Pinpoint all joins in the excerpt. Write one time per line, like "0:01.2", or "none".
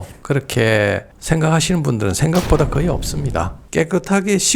0:03.6